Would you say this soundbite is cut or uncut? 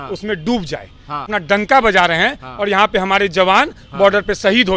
cut